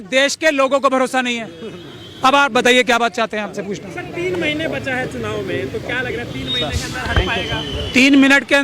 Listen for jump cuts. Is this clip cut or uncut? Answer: uncut